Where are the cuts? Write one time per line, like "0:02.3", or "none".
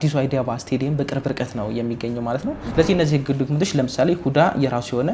0:02.6